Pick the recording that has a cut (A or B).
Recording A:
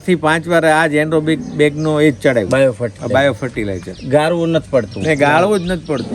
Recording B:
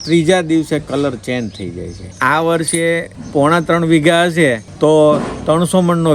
B